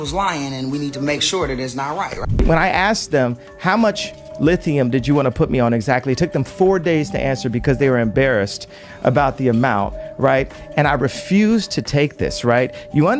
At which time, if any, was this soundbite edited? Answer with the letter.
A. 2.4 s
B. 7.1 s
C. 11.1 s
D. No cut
A